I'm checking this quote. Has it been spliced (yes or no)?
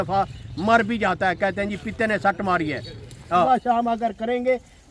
yes